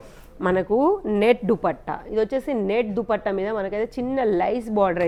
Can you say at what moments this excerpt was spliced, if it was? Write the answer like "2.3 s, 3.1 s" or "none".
none